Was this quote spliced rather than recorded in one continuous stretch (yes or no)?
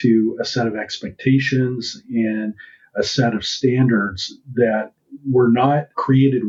no